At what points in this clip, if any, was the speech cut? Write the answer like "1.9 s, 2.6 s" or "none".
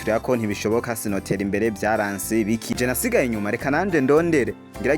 2.8 s

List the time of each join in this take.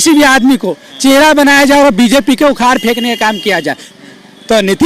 3.9 s

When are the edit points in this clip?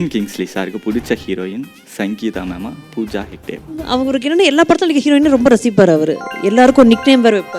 3.8 s

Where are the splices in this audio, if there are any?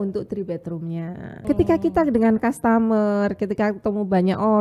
1.3 s

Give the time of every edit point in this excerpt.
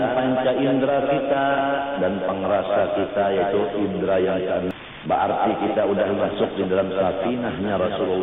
4.7 s

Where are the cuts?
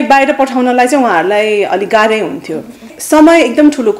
2.9 s

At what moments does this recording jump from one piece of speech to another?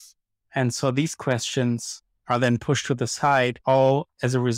3.6 s

